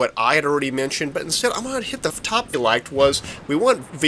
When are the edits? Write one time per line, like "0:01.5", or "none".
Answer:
none